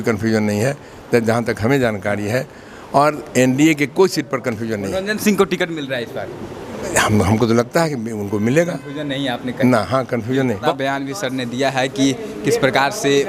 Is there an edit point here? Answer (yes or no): yes